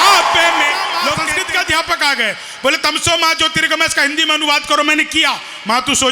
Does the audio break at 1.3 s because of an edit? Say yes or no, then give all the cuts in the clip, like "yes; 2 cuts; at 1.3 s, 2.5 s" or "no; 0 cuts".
yes; 1 cut; at 1.3 s